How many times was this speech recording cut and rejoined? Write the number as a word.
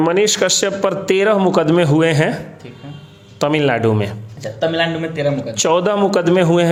zero